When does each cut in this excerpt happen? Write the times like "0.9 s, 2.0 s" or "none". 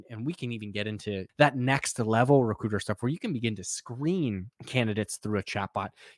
1.3 s, 4.5 s